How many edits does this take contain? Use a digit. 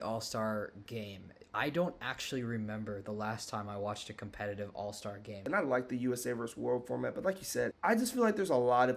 3